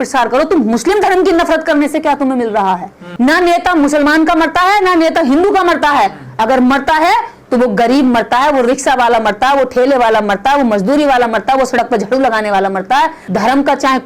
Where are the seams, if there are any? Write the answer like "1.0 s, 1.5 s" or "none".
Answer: 3.0 s, 13.2 s